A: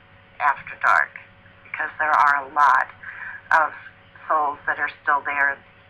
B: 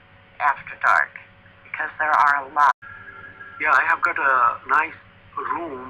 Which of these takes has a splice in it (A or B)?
A